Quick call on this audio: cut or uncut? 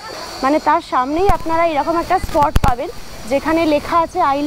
uncut